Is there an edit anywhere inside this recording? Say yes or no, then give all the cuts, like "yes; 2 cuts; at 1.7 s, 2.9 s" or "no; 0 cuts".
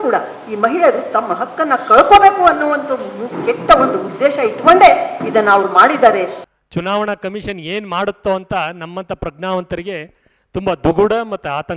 yes; 1 cut; at 6.4 s